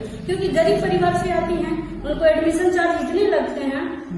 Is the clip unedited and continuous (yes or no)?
yes